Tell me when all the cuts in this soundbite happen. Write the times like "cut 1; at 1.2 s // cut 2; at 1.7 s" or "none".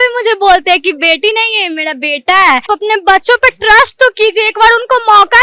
cut 1; at 2.7 s